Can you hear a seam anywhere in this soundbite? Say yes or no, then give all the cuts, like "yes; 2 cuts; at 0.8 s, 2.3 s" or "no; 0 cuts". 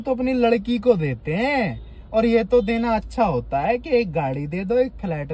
no; 0 cuts